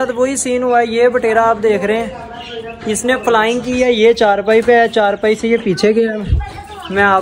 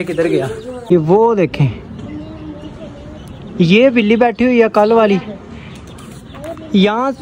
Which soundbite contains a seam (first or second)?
second